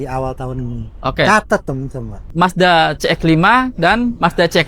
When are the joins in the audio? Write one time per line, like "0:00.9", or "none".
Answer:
0:02.3